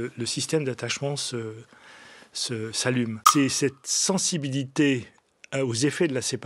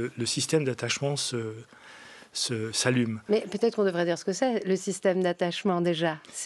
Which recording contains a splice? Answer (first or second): first